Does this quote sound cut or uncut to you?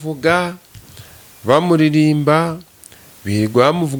uncut